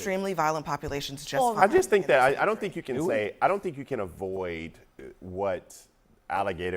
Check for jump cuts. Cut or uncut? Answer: cut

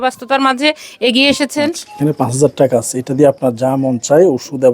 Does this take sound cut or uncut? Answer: cut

